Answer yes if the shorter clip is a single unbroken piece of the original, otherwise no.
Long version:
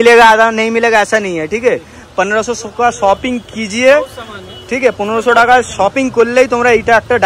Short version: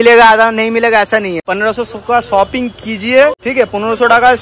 no